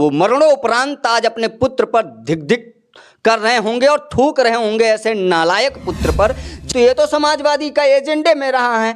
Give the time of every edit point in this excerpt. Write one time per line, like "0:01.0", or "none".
0:06.6

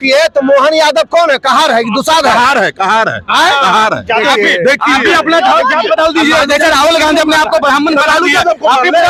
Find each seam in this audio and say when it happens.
none

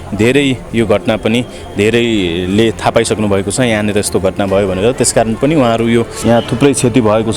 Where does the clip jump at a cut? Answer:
0:06.1

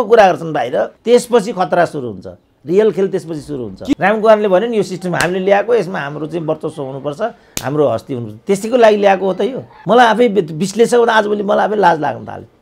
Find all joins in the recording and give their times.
0:01.0
0:03.9
0:09.7

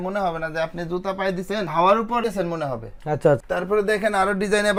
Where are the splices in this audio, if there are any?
none

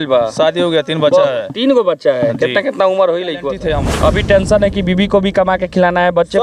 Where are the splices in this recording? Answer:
0:03.5

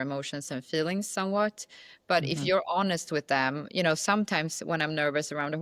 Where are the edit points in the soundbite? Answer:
none

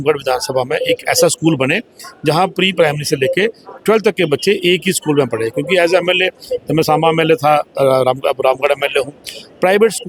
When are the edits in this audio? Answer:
none

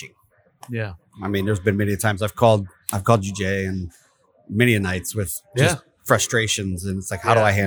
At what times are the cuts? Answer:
0:01.0

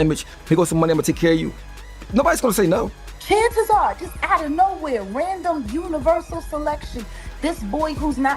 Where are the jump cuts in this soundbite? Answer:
0:03.1

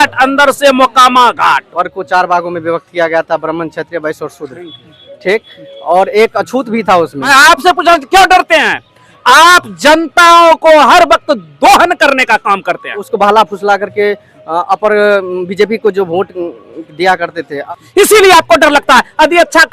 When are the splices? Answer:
0:01.7
0:07.3
0:13.1
0:17.6

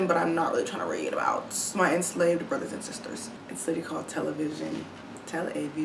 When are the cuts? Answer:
0:03.3

